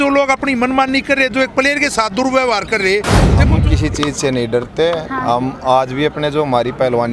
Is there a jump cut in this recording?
yes; 1 cut; at 3.5 s

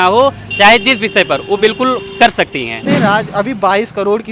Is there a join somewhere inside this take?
yes; 1 cut; at 2.9 s

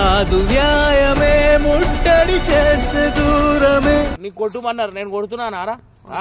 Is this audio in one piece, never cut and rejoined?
no; 1 cut; at 4.2 s

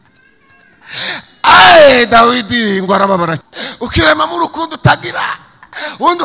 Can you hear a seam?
yes; 1 cut; at 3.4 s

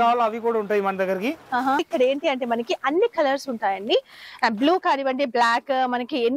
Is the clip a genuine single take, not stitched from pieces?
no; 1 cut; at 1.8 s

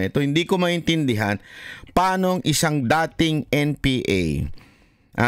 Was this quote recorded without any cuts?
yes; 0 cuts

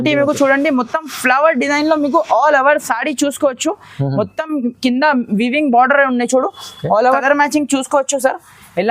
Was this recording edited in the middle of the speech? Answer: yes; 1 cut; at 7.2 s

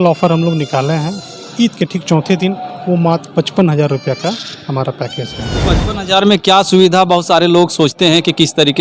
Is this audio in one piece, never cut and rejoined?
no; 1 cut; at 5.6 s

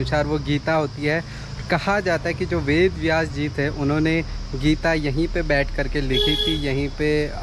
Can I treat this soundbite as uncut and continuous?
yes; 0 cuts

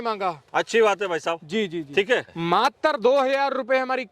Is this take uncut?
no; 1 cut; at 2.3 s

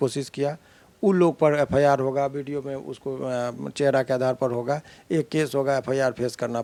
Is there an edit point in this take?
no; 0 cuts

